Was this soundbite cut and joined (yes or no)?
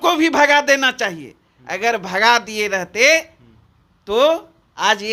no